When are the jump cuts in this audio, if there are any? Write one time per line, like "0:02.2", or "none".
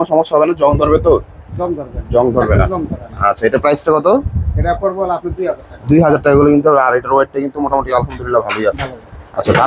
none